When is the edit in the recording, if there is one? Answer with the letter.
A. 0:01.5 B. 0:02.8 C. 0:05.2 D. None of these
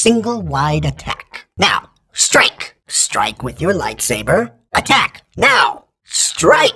D